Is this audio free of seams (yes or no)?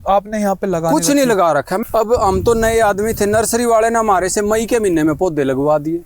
no